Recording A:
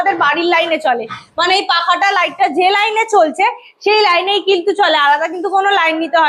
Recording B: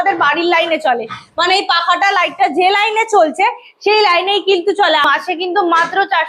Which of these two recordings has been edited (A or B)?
B